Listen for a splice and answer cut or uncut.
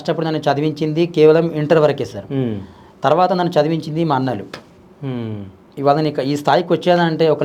uncut